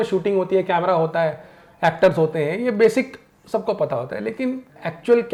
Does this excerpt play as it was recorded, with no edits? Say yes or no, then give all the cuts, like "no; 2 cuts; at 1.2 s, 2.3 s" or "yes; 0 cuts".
yes; 0 cuts